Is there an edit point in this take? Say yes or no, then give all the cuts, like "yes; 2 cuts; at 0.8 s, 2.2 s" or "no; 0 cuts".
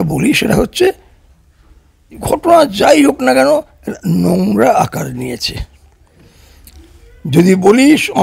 no; 0 cuts